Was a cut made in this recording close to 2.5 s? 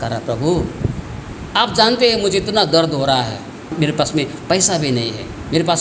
no; 2 cuts; at 1.2 s, 3.7 s

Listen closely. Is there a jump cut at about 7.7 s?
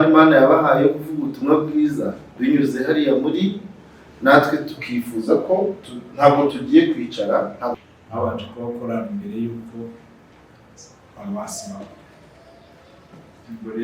yes; 1 cut; at 7.7 s

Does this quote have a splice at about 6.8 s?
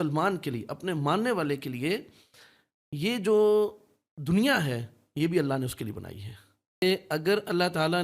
yes; 1 cut; at 6.8 s

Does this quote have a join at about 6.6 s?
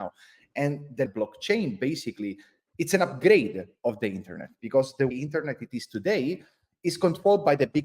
no; 2 cuts; at 1.1 s, 5.1 s

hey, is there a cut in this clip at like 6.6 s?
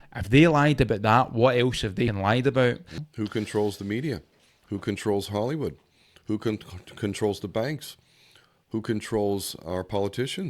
no; 2 cuts; at 2.2 s, 3.1 s

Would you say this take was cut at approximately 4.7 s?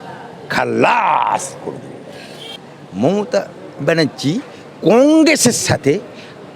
no; 1 cut; at 2.6 s

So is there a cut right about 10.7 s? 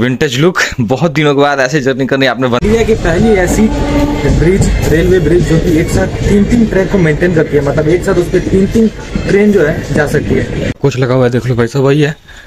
yes; 2 cuts; at 2.6 s, 10.7 s

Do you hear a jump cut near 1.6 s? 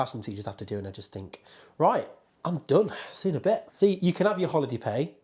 no; 1 cut; at 3.7 s

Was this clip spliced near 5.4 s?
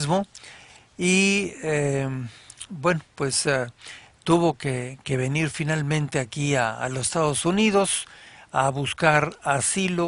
no; 1 cut; at 1.8 s

